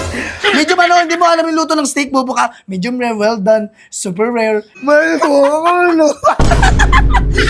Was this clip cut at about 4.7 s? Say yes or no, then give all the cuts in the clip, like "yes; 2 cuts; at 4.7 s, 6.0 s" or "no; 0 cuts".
yes; 1 cut; at 4.7 s